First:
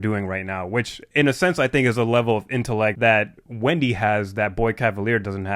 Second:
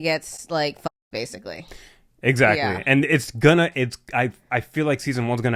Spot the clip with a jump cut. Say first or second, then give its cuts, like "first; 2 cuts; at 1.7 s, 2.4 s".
first; 1 cut; at 3.0 s